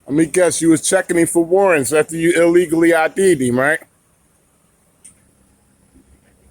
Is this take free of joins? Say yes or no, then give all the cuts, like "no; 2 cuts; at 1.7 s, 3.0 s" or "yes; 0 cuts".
no; 1 cut; at 5.1 s